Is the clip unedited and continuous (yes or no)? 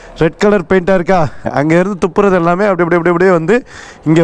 no